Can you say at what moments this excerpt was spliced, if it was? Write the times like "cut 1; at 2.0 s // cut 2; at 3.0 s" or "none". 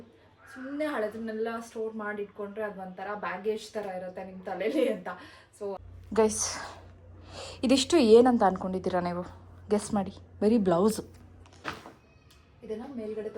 cut 1; at 5.8 s // cut 2; at 11.7 s